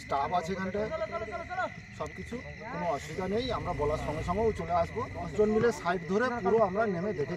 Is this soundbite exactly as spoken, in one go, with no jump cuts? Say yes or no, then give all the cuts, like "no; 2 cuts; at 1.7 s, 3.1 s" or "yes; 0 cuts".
no; 1 cut; at 5.2 s